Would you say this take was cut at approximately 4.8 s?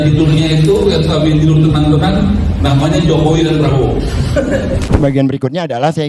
yes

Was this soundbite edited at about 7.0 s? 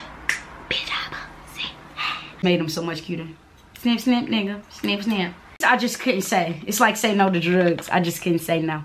no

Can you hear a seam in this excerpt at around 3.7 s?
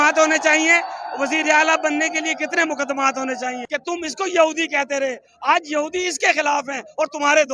yes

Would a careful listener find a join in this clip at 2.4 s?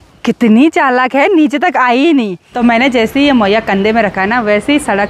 yes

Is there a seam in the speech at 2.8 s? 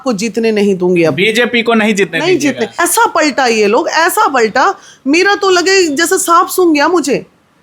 yes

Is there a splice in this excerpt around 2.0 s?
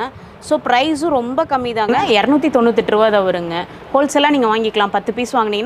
yes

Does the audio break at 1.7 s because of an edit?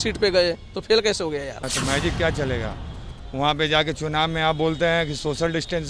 yes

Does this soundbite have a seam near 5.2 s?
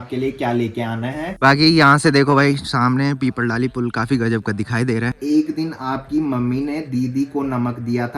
yes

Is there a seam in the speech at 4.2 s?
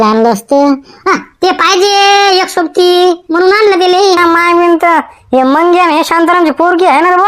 yes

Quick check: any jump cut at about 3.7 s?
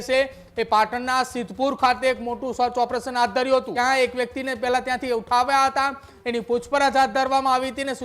yes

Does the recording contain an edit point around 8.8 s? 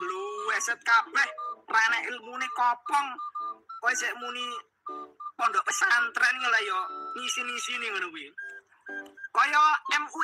yes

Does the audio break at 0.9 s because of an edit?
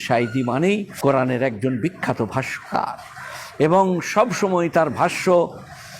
yes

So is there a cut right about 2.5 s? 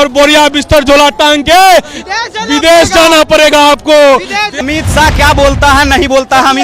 no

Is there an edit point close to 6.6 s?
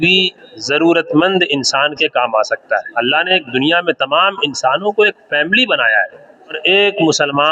yes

